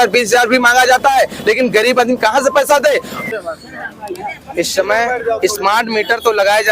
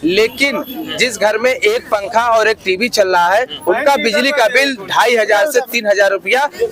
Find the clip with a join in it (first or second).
first